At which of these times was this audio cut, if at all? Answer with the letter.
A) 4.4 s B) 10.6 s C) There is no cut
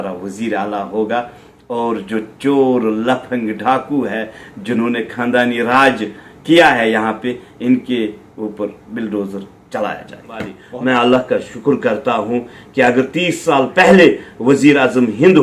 B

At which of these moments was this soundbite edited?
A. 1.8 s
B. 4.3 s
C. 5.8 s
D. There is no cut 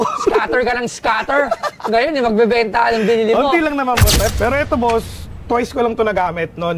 B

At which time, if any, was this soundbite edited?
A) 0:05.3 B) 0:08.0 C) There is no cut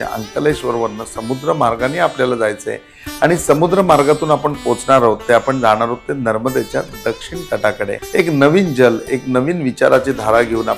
B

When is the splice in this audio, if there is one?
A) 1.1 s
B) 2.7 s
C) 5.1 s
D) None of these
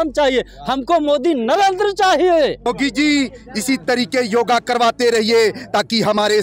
B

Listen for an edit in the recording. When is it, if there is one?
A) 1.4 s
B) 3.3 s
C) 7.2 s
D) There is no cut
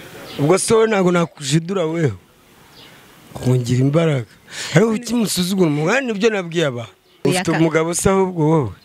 C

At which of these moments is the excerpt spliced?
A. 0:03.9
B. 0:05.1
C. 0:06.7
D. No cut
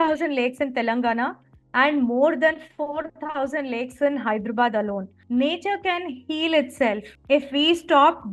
B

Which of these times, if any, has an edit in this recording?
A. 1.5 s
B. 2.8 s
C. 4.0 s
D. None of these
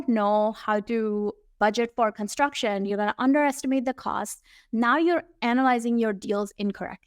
A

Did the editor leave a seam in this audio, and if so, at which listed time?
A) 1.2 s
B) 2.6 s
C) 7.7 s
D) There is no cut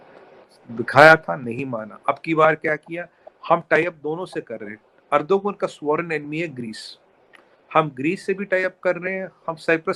D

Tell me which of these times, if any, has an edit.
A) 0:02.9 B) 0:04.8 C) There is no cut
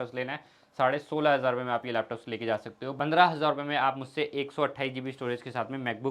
A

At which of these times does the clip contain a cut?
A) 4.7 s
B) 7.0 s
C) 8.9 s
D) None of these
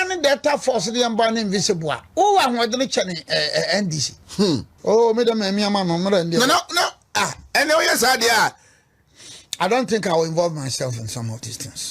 A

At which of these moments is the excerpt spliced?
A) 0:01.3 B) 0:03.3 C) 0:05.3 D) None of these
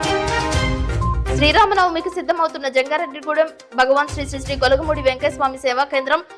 D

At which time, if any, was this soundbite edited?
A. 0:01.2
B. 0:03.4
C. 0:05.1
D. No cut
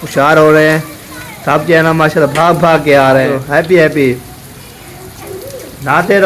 B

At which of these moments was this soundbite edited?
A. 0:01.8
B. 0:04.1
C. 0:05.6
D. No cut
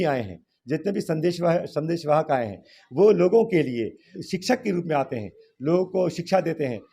B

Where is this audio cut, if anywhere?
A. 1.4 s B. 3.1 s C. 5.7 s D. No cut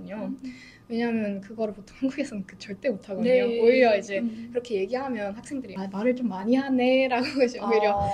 C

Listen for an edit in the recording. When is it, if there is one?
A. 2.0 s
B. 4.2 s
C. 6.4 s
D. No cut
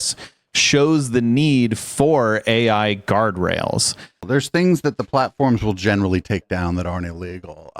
B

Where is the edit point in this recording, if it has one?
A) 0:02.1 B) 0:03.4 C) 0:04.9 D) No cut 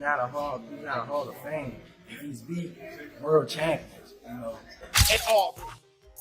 C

